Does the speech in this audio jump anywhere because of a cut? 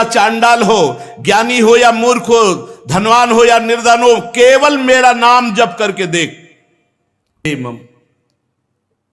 yes; 1 cut; at 7.5 s

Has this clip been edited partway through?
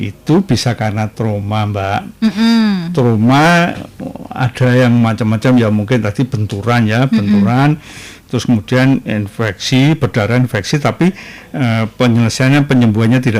no; 0 cuts

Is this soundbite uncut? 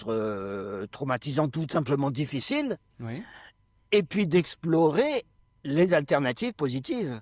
yes; 0 cuts

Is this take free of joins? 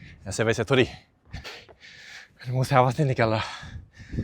no; 1 cut; at 1.6 s

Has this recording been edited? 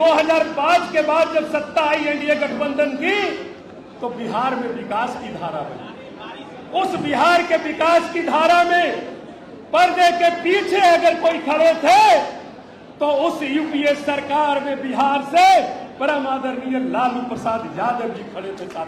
no; 0 cuts

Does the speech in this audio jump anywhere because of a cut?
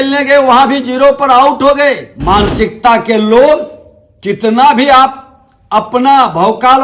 yes; 1 cut; at 2.1 s

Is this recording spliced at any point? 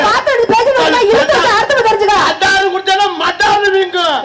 no; 0 cuts

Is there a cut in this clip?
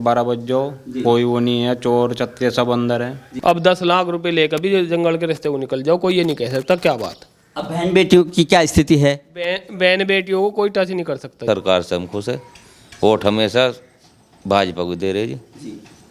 yes; 2 cuts; at 3.2 s, 11.4 s

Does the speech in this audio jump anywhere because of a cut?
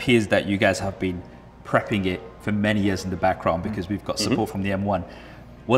no; 0 cuts

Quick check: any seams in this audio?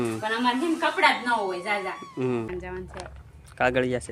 yes; 1 cut; at 2.5 s

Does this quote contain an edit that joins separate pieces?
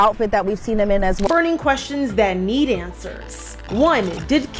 yes; 1 cut; at 1.3 s

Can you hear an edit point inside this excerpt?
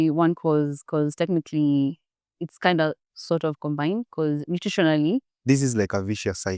yes; 1 cut; at 5.3 s

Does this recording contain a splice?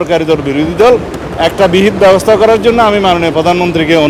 no; 0 cuts

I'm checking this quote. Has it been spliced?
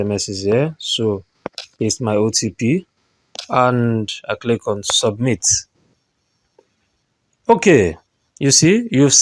no; 0 cuts

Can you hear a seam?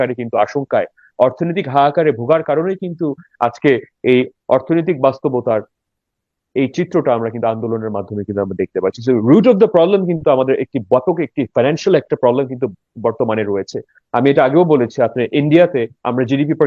no; 0 cuts

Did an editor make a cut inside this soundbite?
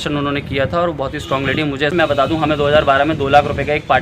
yes; 1 cut; at 1.9 s

